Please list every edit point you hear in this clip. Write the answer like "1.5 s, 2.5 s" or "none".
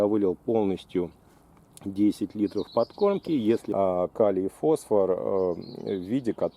3.6 s